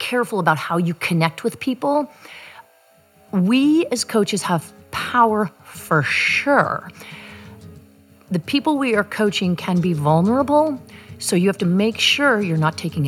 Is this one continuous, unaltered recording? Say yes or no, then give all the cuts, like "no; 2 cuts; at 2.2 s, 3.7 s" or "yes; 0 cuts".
yes; 0 cuts